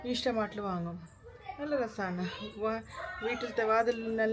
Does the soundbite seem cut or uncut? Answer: uncut